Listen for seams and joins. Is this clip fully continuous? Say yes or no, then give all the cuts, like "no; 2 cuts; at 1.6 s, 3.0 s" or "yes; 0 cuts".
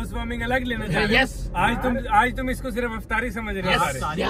yes; 0 cuts